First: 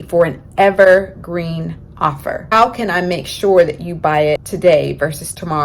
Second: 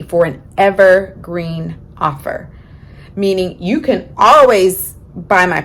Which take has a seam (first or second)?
first